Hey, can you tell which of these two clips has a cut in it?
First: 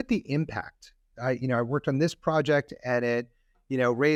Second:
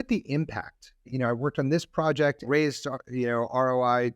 second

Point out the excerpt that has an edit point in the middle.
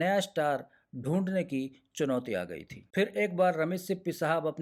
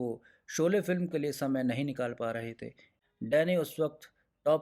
second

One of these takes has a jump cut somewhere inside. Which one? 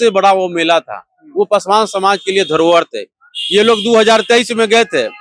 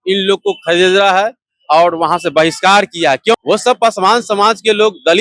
second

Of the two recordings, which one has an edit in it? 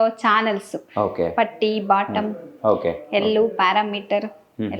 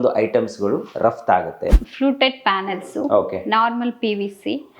second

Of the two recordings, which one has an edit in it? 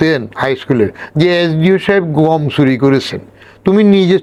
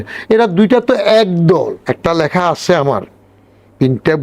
second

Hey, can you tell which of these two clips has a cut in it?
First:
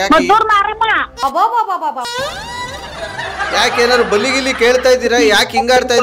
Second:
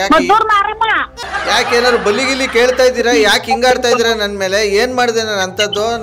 second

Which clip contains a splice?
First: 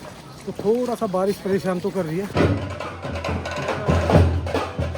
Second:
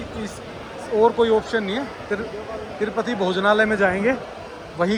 first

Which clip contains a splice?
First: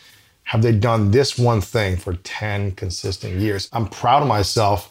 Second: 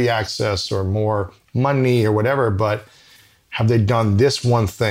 first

